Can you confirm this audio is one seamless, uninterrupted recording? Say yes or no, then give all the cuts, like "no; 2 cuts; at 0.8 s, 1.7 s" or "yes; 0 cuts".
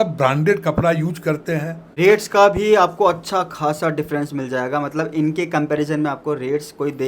no; 1 cut; at 1.7 s